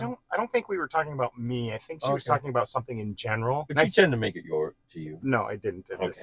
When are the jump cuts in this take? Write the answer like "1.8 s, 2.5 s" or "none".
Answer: 3.7 s